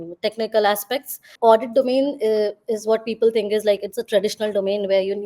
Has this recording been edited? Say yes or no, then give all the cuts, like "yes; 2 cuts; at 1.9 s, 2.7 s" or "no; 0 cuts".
yes; 1 cut; at 1.3 s